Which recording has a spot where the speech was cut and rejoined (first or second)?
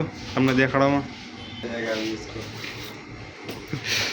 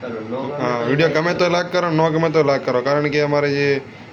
first